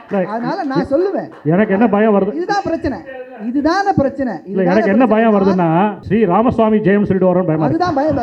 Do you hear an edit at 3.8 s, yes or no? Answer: no